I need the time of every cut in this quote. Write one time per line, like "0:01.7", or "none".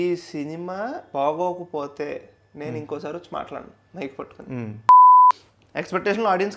0:01.0
0:04.7
0:05.3